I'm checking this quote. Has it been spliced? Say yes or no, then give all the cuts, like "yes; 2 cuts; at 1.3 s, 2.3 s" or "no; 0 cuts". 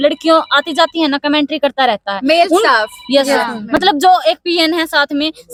no; 0 cuts